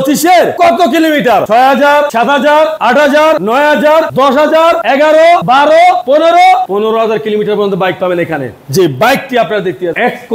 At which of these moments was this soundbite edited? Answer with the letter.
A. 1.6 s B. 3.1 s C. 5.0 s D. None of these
D